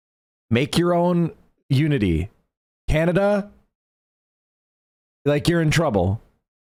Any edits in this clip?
no; 0 cuts

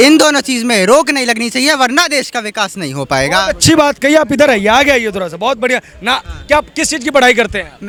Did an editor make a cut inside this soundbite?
no; 0 cuts

